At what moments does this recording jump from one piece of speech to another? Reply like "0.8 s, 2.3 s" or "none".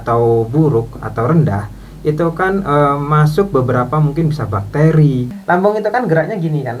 5.3 s